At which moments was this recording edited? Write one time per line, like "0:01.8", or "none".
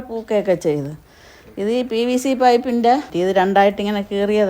0:03.1